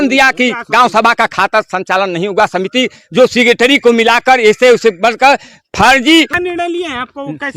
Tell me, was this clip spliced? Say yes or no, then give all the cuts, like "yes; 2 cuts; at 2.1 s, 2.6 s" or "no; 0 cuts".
yes; 1 cut; at 6.3 s